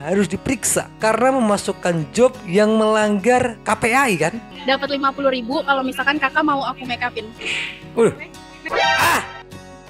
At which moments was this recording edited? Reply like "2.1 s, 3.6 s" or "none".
4.4 s